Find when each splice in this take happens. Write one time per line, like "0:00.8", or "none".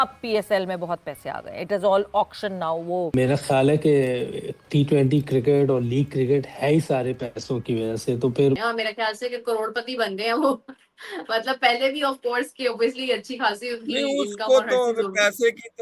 0:03.1
0:08.6